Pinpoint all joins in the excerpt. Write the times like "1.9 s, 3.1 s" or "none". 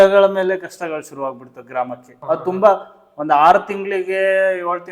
2.1 s

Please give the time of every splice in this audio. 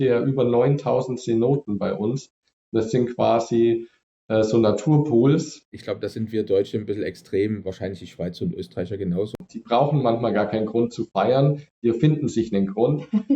5.8 s, 9.4 s

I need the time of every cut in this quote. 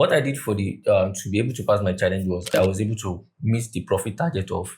2.5 s

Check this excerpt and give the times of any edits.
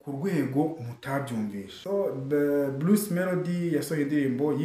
1.7 s

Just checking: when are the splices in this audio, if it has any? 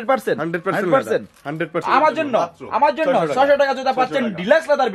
1.8 s

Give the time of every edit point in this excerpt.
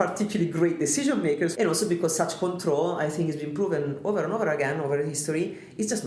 1.5 s

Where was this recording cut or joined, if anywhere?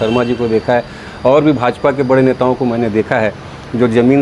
none

